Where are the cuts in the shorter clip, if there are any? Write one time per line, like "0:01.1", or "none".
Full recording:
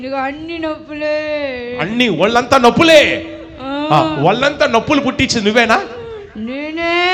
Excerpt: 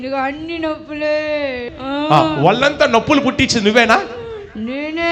0:01.7

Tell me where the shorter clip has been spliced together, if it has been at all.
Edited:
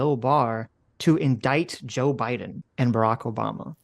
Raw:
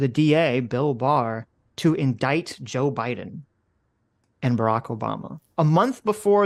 0:02.6

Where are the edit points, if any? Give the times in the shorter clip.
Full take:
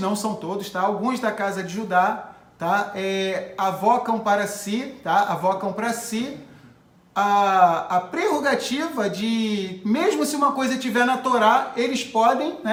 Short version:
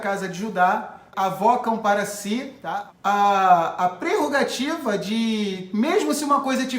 0:01.1
0:02.6

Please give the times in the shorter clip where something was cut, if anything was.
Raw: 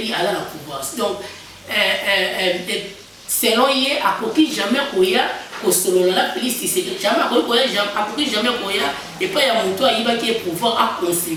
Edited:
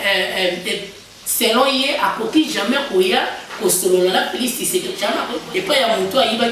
0:05.3

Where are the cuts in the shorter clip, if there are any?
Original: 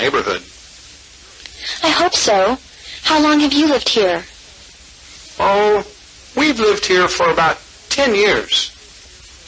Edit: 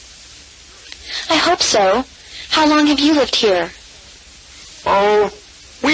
none

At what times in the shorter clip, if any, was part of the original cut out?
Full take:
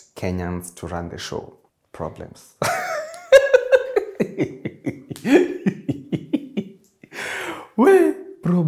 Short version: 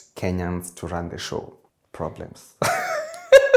none

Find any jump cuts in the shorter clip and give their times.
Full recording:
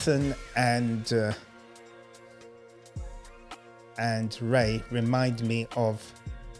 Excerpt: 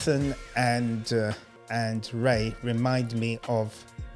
0:01.5

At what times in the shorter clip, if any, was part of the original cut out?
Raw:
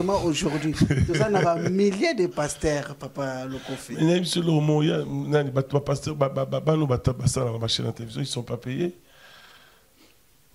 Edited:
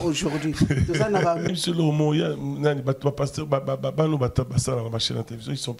0:01.5

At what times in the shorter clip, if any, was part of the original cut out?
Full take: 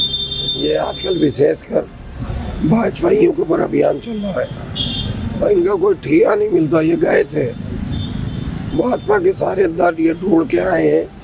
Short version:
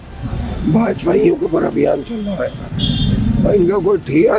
none

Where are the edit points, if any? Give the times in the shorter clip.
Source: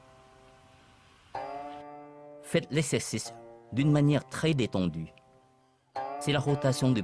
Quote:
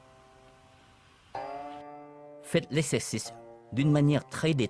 none

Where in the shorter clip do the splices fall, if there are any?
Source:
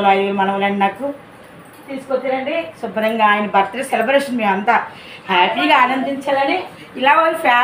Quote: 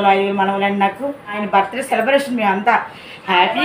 0:01.4

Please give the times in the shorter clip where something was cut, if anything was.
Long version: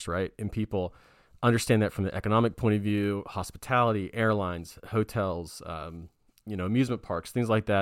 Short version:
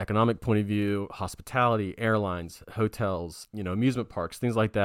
0:03.4

